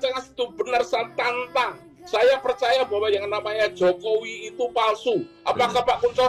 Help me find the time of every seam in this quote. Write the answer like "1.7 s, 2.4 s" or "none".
none